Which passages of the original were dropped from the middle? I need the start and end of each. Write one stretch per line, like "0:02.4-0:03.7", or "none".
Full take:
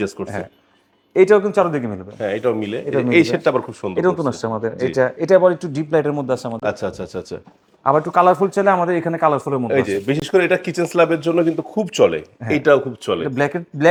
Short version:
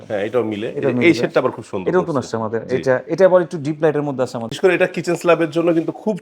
0:06.6-0:10.2